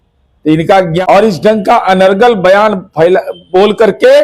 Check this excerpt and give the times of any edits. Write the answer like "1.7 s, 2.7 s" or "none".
1.0 s